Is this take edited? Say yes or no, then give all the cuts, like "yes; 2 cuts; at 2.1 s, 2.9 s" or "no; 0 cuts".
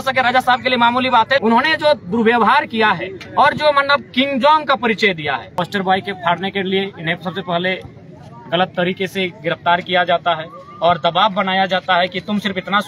yes; 2 cuts; at 1.4 s, 5.5 s